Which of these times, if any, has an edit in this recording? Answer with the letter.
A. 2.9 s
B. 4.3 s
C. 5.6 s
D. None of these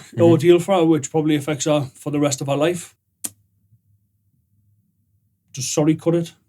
A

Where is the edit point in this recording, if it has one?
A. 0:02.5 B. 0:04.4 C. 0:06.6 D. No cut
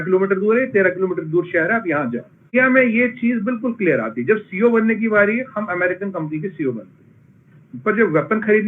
A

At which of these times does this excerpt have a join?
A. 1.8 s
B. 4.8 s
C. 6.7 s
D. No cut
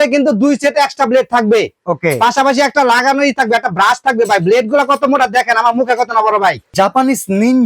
C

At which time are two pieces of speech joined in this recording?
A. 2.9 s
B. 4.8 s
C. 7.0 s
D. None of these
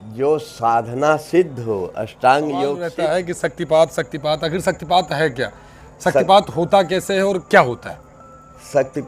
A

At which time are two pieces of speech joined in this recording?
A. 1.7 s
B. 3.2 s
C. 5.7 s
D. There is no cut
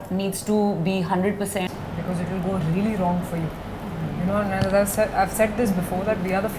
A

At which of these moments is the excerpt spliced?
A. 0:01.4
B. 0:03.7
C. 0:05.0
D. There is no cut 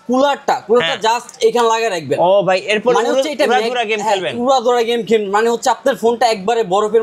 D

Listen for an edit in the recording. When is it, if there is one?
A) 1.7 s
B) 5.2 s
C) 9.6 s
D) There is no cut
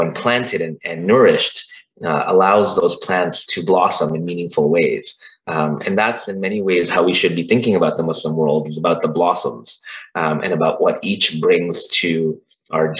D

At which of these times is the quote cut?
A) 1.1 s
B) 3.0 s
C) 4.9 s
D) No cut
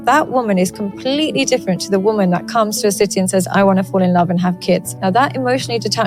C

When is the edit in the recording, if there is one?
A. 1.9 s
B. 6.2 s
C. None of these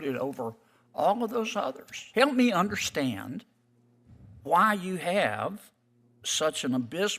A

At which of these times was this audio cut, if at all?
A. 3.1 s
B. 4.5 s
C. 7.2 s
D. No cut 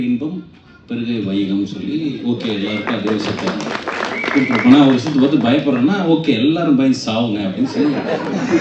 D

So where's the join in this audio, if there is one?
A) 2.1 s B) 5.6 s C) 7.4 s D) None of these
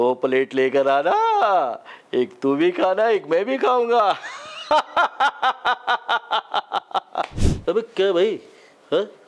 C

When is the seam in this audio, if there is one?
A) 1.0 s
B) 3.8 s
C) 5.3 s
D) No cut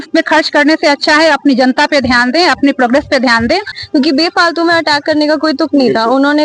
B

